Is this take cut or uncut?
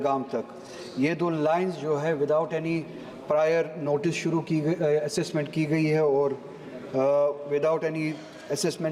uncut